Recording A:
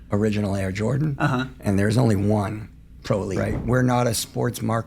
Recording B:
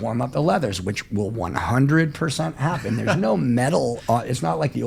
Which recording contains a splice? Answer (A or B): A